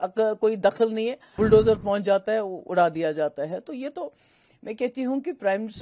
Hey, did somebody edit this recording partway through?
yes; 1 cut; at 1.2 s

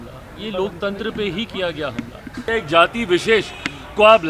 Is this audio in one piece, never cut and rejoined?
no; 1 cut; at 2.4 s

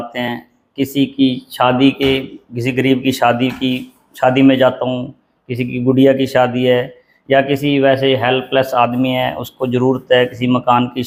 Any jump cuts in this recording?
no; 0 cuts

